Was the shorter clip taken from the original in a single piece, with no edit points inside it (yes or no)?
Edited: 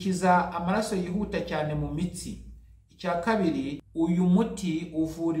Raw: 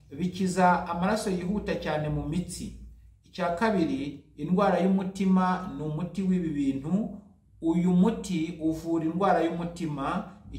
no